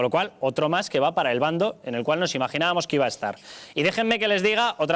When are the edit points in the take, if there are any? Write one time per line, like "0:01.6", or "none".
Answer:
0:03.7